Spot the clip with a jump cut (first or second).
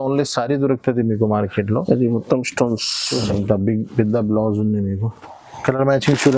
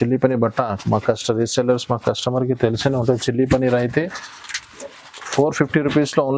first